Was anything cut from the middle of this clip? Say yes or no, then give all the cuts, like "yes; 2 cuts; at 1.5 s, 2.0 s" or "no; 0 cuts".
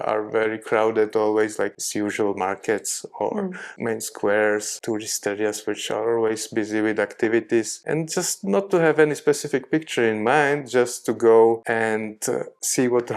yes; 4 cuts; at 1.7 s, 3.7 s, 4.7 s, 7.8 s